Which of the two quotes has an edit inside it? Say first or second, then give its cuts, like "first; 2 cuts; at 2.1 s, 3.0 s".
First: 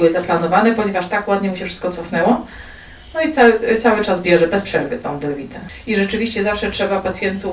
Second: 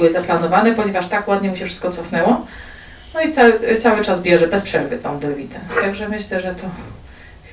first; 1 cut; at 5.6 s